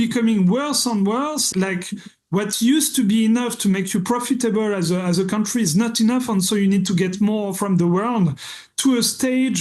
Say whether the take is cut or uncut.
cut